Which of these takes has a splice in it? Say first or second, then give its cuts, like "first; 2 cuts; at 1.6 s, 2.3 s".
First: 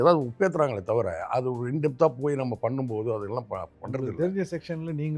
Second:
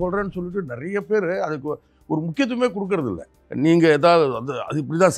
second; 1 cut; at 3.3 s